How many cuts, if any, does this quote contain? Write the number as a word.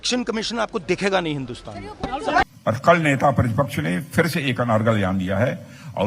one